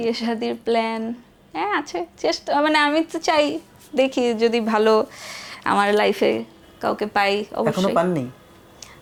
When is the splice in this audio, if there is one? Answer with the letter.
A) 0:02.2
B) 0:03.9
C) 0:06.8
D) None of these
D